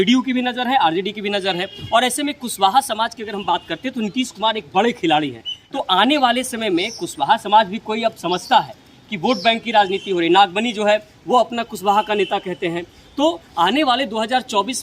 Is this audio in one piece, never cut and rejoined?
no; 1 cut; at 5.5 s

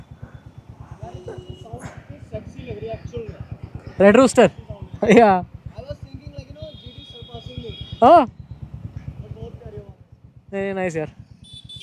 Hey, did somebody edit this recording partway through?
no; 0 cuts

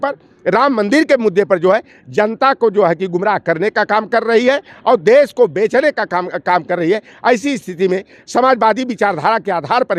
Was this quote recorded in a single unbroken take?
yes; 0 cuts

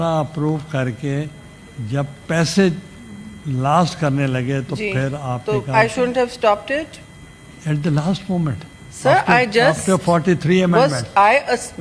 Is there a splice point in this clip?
no; 0 cuts

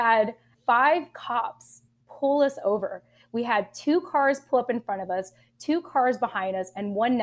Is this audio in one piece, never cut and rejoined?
yes; 0 cuts

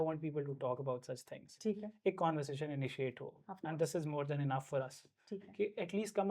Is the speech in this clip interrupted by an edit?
no; 0 cuts

